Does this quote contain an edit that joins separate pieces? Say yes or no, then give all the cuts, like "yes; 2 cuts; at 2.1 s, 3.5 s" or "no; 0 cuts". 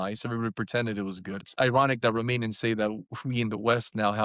yes; 1 cut; at 1.4 s